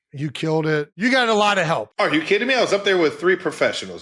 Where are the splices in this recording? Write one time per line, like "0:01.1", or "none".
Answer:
0:00.9